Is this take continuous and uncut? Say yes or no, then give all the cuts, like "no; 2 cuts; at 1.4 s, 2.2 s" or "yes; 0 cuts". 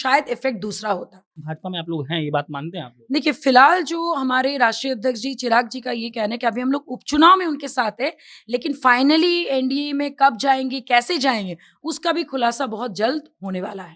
no; 1 cut; at 1.4 s